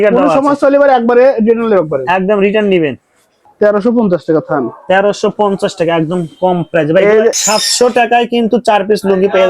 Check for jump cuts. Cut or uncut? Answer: cut